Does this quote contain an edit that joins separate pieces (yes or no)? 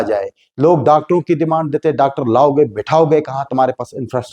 no